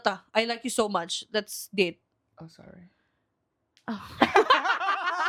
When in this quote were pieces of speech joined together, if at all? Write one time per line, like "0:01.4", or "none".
none